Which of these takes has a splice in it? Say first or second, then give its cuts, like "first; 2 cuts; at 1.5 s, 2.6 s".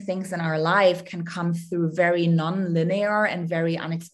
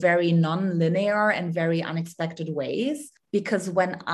second; 1 cut; at 3.1 s